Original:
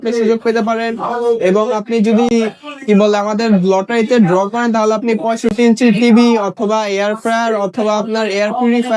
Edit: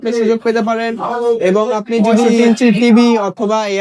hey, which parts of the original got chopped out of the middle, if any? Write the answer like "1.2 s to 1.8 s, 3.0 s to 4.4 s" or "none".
2.3 s to 5.5 s